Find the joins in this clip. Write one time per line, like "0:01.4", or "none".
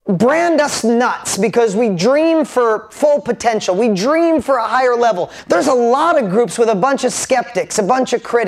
0:05.3